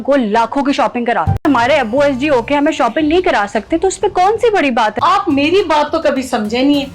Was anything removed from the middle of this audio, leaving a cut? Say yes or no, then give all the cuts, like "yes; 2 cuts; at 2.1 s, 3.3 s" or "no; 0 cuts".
yes; 2 cuts; at 1.4 s, 4.9 s